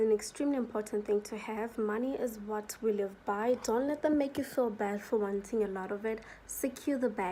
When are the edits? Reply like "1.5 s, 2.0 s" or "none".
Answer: none